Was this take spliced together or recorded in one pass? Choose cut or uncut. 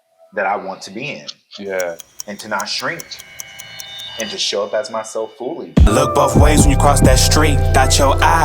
cut